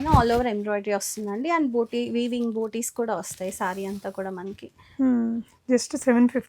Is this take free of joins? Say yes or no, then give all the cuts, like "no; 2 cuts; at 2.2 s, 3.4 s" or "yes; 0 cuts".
yes; 0 cuts